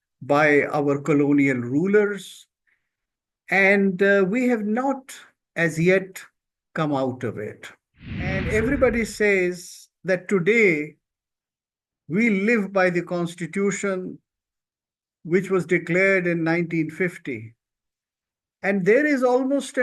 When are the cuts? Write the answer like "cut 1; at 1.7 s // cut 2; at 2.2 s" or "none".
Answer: cut 1; at 8.4 s